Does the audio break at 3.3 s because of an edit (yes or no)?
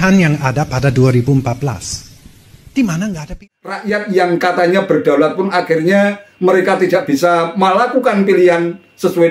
yes